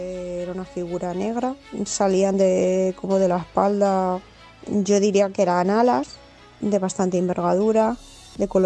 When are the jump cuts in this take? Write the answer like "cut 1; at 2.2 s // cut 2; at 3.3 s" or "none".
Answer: cut 1; at 1.8 s